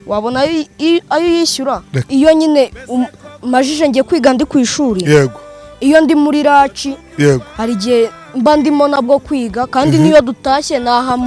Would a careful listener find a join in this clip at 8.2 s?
no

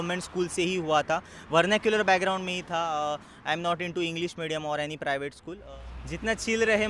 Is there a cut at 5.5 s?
yes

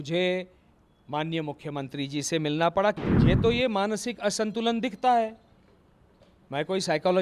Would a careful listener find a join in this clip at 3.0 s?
yes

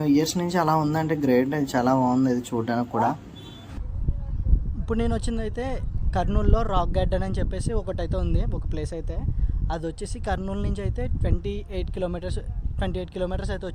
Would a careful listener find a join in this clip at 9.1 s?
no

